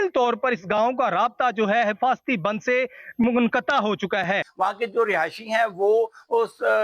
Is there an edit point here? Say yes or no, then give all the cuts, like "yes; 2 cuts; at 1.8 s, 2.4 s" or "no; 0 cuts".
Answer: no; 0 cuts